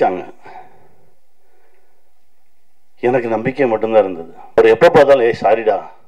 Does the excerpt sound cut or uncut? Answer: cut